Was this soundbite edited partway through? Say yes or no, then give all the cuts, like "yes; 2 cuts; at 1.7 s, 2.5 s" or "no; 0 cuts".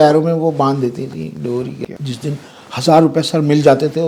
yes; 1 cut; at 1.8 s